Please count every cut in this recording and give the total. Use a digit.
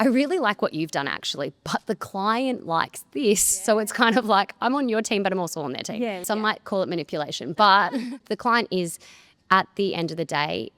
2